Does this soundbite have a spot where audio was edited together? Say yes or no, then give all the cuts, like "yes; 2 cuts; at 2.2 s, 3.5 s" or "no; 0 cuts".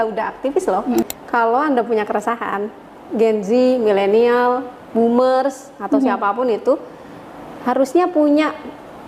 yes; 1 cut; at 1.1 s